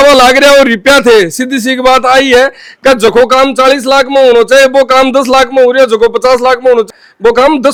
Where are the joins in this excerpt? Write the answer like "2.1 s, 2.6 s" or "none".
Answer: none